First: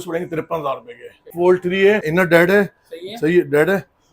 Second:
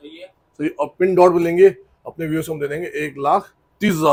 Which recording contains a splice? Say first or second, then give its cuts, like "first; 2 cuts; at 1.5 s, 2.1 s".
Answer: first; 2 cuts; at 1.3 s, 2.0 s